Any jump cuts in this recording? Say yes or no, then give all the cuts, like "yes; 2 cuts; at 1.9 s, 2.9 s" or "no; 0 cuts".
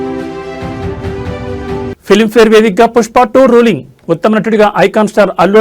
no; 0 cuts